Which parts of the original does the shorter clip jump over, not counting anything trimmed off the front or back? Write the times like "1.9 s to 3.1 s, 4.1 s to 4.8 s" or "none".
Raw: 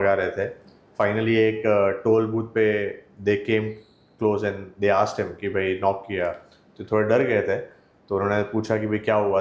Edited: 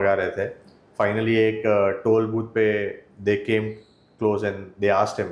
none